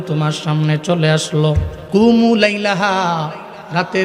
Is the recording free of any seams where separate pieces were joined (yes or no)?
no